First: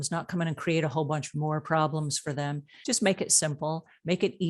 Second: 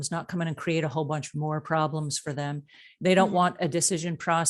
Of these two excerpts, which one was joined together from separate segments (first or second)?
first